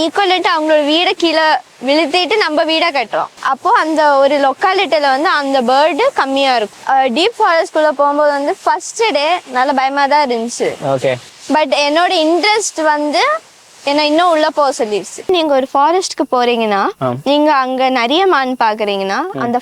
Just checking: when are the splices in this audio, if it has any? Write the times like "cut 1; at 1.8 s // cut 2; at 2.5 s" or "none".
cut 1; at 3.4 s // cut 2; at 6.7 s // cut 3; at 15.3 s